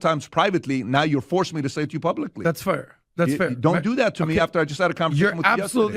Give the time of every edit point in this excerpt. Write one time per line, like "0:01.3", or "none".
0:02.6